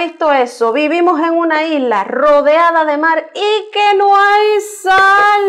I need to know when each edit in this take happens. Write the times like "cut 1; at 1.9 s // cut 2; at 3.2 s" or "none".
none